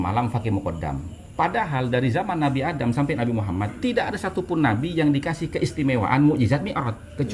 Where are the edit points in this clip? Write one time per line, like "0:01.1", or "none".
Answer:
0:01.2